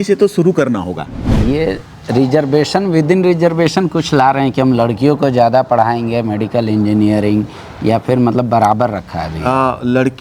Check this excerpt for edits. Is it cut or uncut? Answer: cut